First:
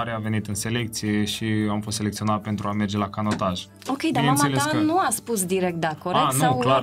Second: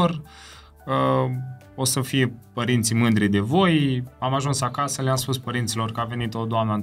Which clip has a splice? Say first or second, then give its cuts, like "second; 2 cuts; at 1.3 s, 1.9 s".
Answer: second; 1 cut; at 4.1 s